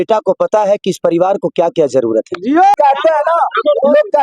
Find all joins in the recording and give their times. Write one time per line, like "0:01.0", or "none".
0:02.8